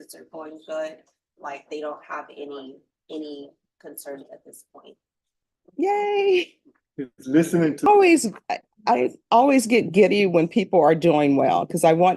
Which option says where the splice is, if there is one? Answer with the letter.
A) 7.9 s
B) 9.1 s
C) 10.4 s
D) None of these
A